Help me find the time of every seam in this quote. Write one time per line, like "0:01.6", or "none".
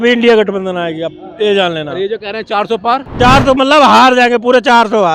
0:03.1